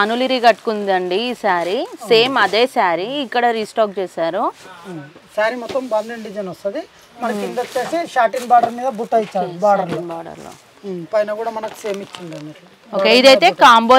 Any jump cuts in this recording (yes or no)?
no